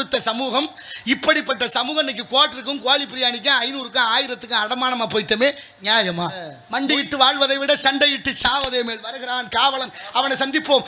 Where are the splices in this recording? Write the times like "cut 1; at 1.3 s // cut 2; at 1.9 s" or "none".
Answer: cut 1; at 6.6 s